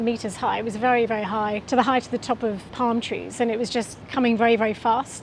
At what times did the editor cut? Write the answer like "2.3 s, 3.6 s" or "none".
2.7 s, 4.0 s